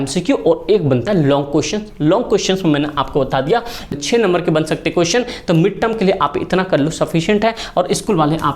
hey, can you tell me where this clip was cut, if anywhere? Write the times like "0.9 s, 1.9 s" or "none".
3.9 s